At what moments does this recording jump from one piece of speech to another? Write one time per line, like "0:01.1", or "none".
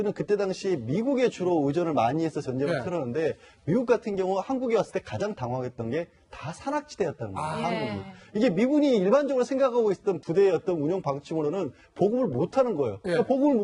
0:09.0